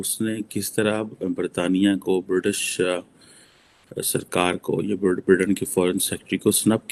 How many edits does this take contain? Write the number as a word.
zero